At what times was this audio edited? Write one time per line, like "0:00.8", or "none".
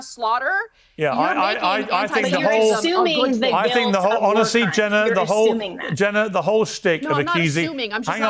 none